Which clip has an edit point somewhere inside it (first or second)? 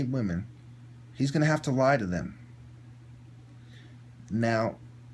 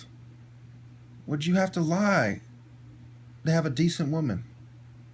first